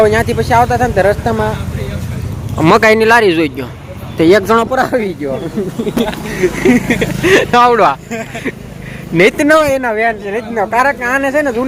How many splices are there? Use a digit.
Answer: 0